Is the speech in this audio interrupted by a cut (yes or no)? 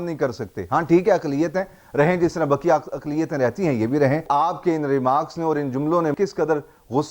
yes